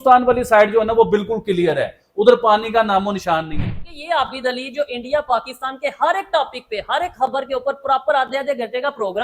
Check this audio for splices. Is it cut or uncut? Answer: cut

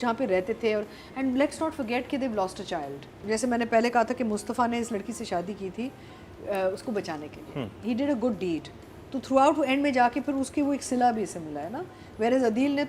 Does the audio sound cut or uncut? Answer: cut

